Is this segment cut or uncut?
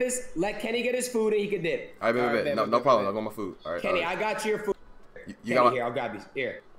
uncut